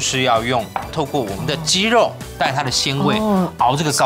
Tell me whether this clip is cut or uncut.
cut